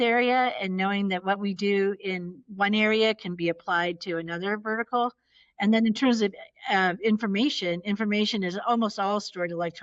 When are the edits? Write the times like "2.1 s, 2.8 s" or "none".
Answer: none